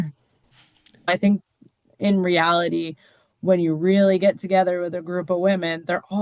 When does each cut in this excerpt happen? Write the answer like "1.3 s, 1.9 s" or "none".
1.1 s